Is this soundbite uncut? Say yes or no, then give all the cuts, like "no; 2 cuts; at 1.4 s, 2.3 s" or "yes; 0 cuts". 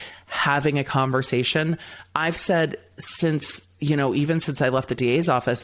yes; 0 cuts